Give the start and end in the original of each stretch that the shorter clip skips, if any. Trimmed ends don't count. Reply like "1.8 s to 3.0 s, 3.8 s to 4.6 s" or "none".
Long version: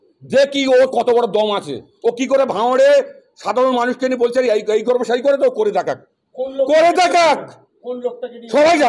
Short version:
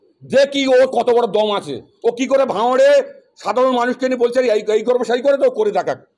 none